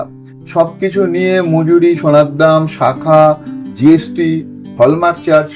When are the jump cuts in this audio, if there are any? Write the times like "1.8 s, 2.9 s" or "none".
none